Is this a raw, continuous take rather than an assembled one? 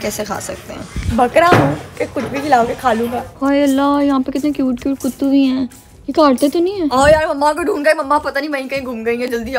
no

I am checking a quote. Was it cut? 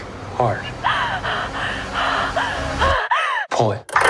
no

